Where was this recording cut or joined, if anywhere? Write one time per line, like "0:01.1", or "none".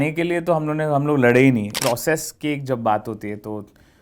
0:01.7